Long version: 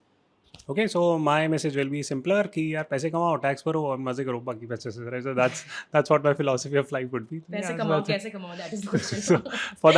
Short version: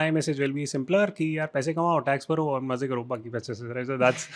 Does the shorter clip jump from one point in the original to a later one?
no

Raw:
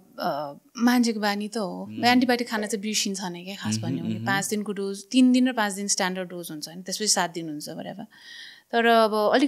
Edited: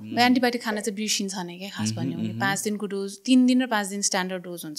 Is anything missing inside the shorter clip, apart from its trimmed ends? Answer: no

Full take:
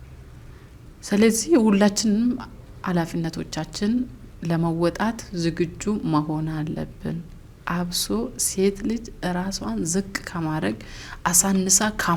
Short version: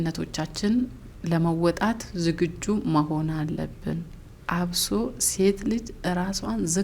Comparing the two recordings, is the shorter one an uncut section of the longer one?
yes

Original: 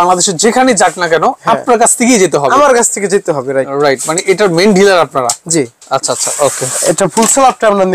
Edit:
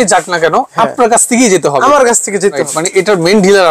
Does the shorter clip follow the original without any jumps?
no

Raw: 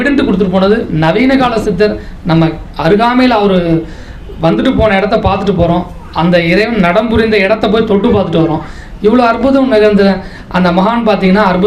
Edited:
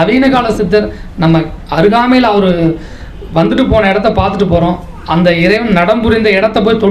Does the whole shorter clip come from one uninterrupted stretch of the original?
yes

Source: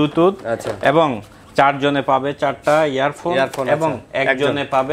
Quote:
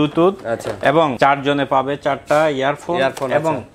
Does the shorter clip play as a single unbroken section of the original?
no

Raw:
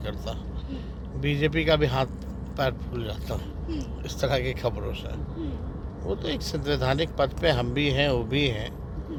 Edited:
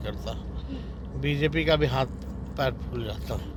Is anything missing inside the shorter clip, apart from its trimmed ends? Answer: no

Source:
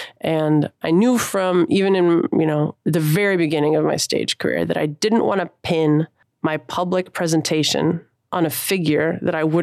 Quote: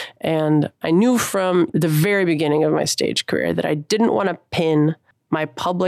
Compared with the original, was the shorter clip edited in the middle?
yes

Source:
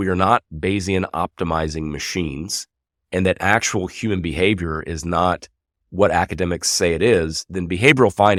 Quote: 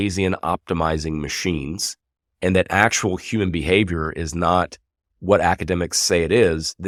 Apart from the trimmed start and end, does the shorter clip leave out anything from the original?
no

